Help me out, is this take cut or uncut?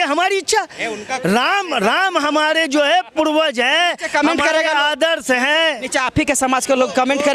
uncut